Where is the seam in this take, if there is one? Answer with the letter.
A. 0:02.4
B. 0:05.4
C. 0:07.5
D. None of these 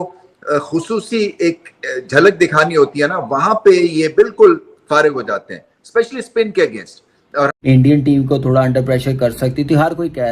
C